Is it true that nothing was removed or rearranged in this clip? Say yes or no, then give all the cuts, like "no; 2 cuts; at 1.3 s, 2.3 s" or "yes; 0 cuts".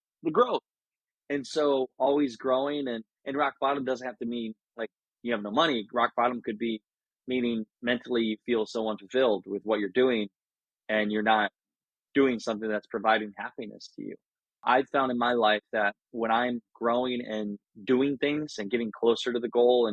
no; 1 cut; at 14.5 s